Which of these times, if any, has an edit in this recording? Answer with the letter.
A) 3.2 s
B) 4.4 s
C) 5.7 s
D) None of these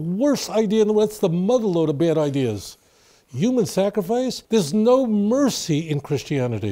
B